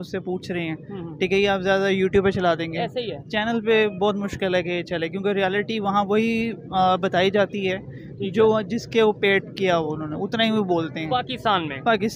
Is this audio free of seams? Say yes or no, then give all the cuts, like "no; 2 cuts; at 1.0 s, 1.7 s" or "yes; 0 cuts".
yes; 0 cuts